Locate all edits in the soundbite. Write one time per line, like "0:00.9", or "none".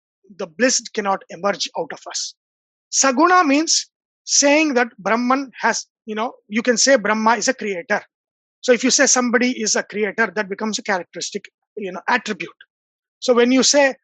0:02.7